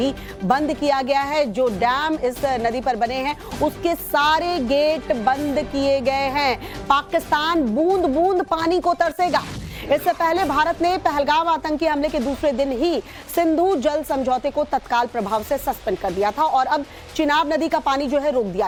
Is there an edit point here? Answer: no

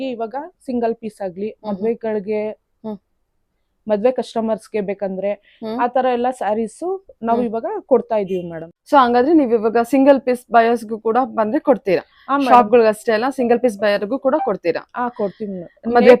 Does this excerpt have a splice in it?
no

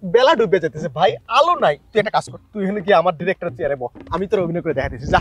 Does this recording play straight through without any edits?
yes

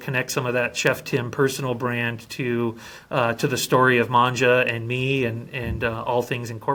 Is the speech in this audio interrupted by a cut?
no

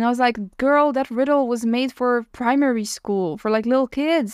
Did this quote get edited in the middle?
yes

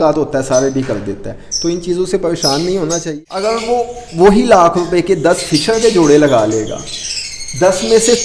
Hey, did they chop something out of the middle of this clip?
yes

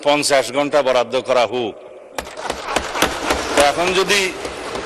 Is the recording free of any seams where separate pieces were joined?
yes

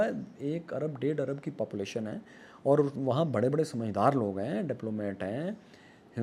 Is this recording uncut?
yes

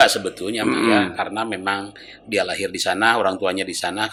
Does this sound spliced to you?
no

